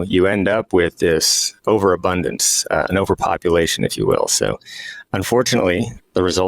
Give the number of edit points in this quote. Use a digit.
0